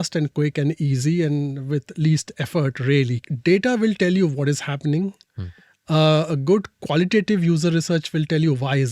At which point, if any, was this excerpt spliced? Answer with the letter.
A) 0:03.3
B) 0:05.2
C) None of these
A